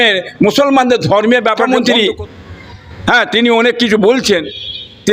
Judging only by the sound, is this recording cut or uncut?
cut